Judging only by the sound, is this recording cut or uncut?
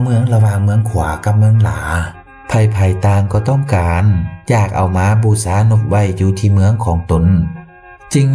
uncut